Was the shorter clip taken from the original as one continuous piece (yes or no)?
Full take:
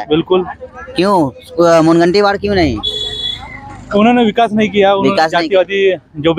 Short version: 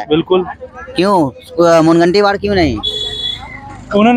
yes